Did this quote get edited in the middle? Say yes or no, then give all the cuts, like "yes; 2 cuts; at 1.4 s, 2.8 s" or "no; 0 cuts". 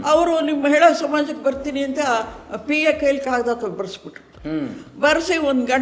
no; 0 cuts